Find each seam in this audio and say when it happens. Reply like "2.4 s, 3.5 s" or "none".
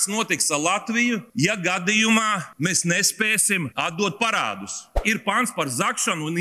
1.3 s, 2.5 s, 3.7 s, 5.0 s